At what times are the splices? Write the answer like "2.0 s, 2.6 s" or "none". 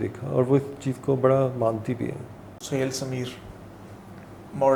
2.5 s

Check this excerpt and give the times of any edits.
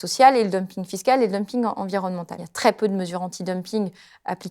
2.5 s

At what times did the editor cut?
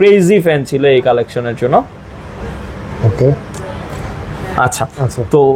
none

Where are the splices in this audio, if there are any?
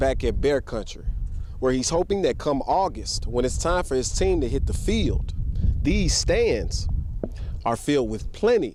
none

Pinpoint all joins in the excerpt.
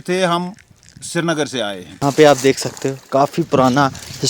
1.9 s

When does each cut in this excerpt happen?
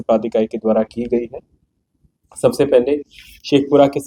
none

